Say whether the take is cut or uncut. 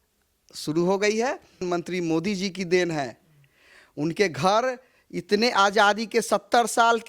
cut